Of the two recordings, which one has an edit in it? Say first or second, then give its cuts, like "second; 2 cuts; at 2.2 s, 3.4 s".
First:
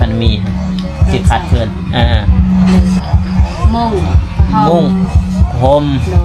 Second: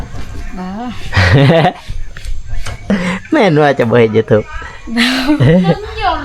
first; 1 cut; at 2.8 s